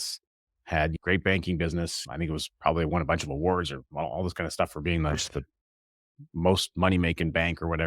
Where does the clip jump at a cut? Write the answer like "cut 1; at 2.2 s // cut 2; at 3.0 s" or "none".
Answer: cut 1; at 1.0 s // cut 2; at 2.0 s